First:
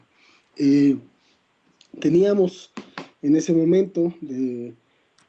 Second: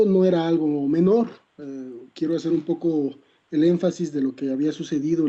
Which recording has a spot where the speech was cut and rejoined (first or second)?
second